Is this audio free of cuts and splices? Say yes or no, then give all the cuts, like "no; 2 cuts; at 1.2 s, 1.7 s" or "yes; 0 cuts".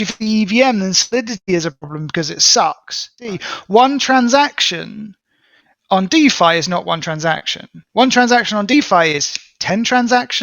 no; 1 cut; at 3.3 s